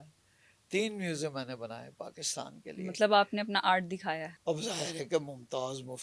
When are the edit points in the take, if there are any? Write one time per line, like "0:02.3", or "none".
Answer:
0:04.3